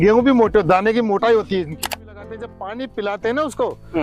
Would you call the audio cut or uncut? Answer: cut